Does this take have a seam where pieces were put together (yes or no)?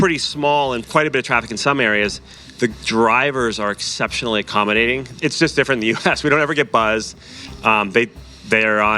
yes